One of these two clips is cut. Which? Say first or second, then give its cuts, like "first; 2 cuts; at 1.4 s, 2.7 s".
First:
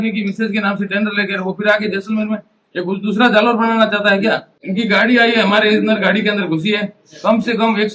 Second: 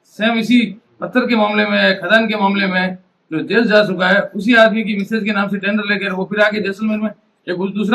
first; 1 cut; at 4.6 s